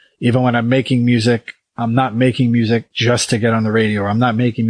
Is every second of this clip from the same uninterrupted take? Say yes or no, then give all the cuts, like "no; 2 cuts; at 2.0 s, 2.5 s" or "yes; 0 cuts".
no; 1 cut; at 2.9 s